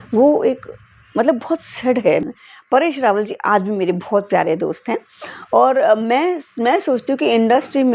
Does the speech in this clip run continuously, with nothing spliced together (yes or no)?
no